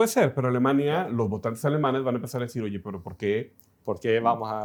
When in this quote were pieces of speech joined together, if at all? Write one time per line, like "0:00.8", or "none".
none